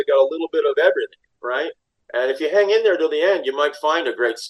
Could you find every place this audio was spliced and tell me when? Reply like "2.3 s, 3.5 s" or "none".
1.3 s